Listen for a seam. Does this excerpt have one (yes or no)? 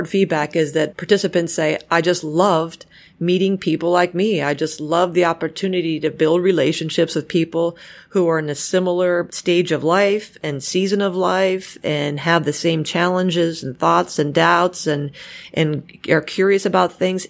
yes